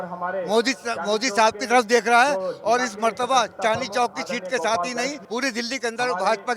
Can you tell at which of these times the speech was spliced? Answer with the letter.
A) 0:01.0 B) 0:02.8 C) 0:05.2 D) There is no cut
C